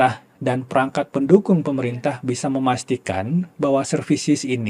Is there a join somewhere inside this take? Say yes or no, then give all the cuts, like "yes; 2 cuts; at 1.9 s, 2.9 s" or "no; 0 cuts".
no; 0 cuts